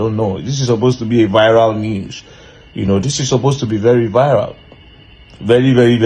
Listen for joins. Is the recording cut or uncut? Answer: uncut